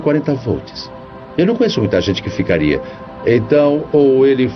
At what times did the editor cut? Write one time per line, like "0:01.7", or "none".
0:02.7